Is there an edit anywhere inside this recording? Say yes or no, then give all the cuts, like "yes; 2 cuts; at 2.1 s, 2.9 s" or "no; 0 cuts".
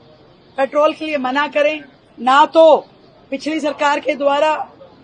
no; 0 cuts